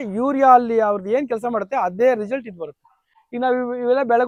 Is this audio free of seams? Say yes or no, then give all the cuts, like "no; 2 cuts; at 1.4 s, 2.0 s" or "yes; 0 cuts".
yes; 0 cuts